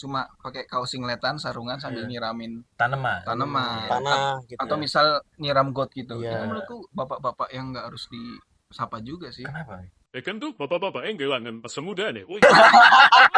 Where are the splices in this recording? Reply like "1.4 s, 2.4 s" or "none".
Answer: none